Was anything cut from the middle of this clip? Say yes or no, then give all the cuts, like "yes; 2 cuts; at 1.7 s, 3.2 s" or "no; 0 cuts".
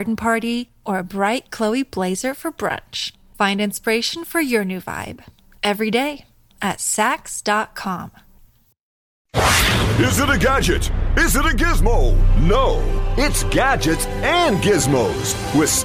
yes; 1 cut; at 9.1 s